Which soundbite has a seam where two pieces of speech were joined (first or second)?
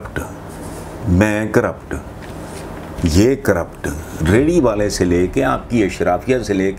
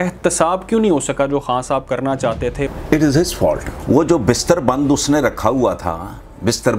second